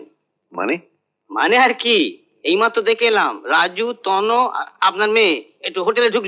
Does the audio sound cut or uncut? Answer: uncut